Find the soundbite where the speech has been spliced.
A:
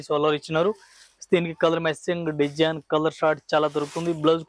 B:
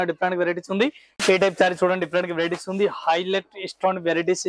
B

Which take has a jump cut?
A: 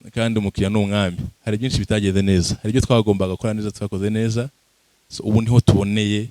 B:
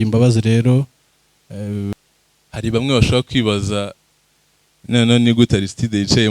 B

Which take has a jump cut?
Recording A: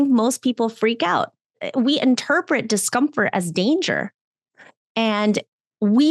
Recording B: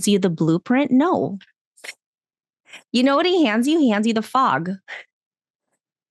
A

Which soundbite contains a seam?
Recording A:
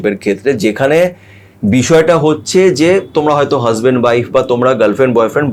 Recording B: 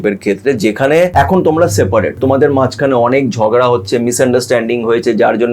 B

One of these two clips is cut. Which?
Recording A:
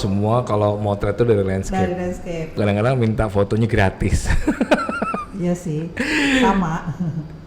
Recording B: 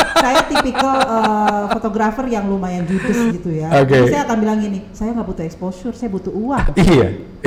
A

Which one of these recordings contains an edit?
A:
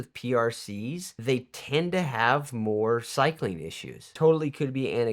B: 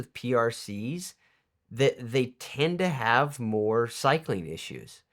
A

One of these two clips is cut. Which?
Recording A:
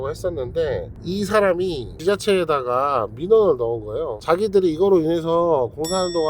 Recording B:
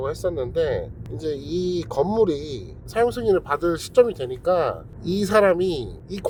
A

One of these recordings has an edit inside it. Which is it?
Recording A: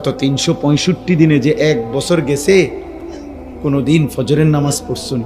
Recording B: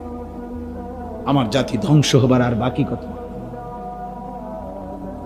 B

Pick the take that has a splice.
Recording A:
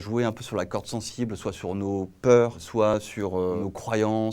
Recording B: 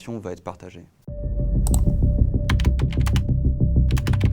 A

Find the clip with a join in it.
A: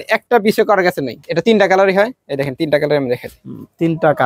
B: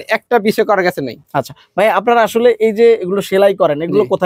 A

